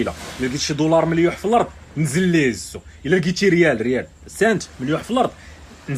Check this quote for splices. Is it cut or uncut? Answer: uncut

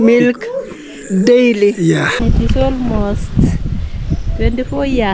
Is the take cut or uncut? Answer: cut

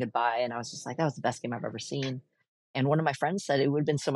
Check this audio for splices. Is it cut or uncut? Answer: uncut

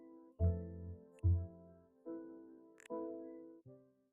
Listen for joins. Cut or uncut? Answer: cut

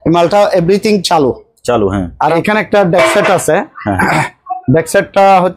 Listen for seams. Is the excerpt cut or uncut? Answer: cut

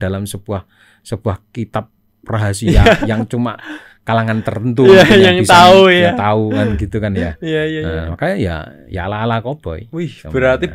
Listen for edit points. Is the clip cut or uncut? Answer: uncut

